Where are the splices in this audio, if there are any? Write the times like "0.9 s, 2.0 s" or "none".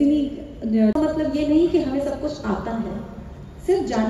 0.9 s

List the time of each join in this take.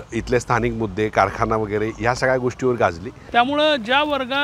3.1 s

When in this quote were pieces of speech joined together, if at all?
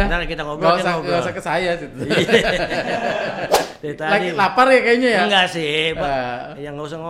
3.7 s

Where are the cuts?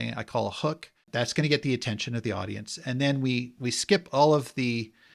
1.1 s

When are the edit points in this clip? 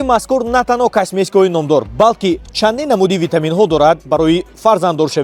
none

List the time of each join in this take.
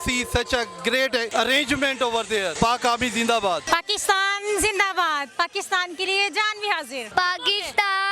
1.3 s, 2.5 s, 3.6 s, 7.0 s

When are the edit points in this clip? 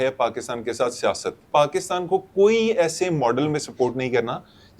1.5 s

